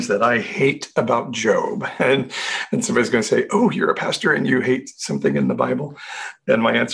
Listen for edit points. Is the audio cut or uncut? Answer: cut